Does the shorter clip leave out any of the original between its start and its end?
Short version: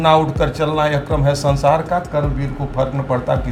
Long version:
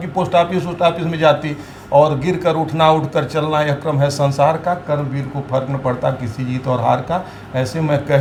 no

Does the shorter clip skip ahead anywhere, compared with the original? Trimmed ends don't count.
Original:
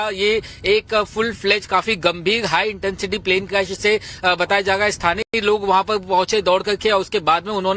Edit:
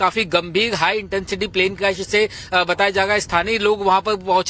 yes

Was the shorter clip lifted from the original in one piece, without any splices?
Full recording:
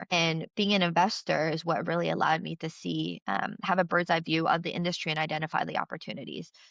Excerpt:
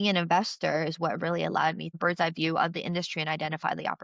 no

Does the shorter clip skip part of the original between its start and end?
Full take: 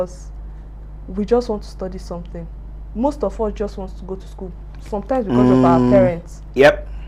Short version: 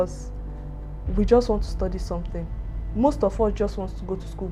no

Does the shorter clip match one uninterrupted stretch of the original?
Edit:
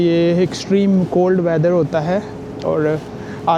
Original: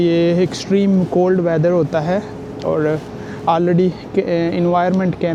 yes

